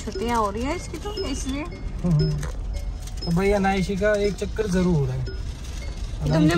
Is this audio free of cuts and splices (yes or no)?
yes